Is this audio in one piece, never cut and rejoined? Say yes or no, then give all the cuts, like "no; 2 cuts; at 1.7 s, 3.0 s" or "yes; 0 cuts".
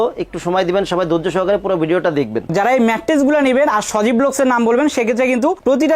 no; 1 cut; at 2.5 s